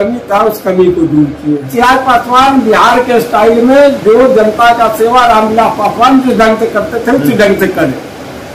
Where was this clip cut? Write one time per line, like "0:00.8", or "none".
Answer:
0:01.7